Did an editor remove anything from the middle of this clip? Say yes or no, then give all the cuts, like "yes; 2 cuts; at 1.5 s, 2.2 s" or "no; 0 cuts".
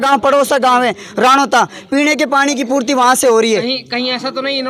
no; 0 cuts